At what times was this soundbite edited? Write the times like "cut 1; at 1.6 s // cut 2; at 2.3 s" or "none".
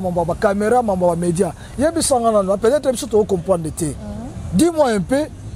none